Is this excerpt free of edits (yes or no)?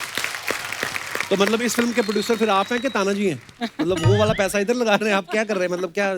yes